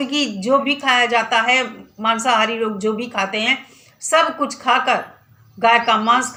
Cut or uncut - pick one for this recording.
uncut